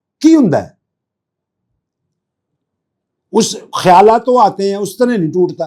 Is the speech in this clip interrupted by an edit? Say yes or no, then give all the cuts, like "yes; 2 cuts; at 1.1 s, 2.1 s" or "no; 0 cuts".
no; 0 cuts